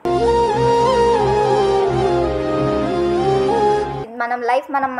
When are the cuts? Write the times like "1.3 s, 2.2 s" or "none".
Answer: 4.1 s